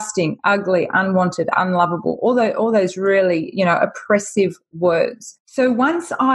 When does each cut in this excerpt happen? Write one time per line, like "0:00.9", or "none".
none